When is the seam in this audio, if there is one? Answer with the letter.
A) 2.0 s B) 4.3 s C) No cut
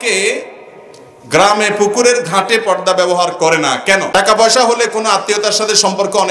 B